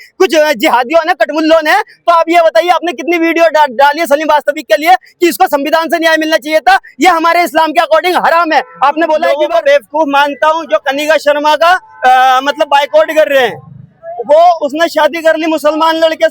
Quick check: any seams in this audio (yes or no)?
yes